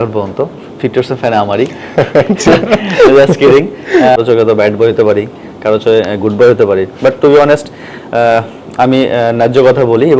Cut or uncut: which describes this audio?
cut